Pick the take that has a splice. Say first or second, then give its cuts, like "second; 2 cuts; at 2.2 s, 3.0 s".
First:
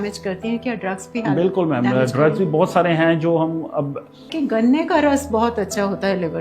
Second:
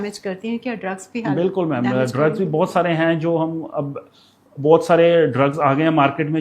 first; 1 cut; at 4.3 s